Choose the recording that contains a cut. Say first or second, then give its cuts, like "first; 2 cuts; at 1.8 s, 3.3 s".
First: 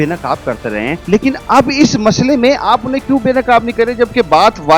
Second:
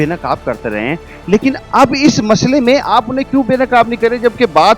first; 1 cut; at 1.3 s